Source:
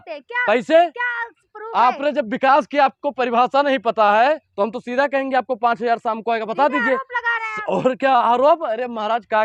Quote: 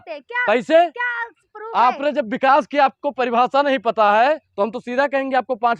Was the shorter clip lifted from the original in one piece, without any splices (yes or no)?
yes